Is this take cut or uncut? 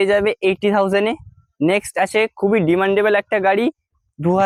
uncut